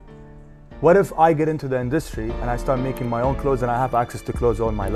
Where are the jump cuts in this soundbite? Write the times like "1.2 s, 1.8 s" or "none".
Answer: none